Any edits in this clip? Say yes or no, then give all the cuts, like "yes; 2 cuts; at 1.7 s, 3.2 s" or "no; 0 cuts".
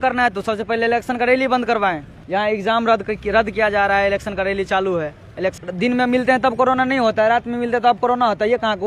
yes; 2 cuts; at 2.1 s, 5.6 s